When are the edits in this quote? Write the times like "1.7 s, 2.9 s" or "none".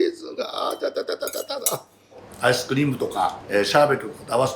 2.3 s, 3.4 s